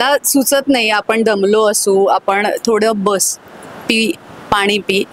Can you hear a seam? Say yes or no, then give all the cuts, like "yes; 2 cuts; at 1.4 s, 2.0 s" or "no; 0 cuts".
no; 0 cuts